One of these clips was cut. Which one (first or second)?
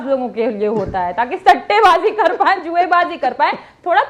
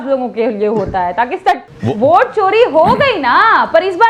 second